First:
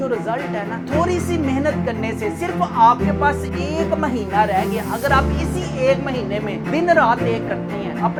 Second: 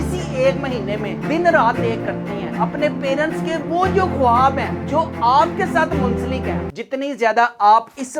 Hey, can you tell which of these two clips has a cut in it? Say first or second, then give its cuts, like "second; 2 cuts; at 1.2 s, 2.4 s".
second; 1 cut; at 6.7 s